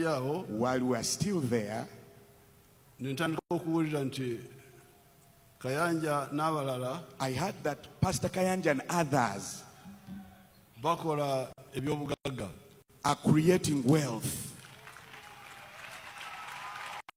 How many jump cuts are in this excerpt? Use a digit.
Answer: 0